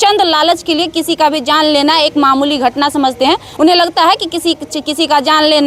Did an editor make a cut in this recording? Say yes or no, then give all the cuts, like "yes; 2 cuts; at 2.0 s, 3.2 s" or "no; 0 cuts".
no; 0 cuts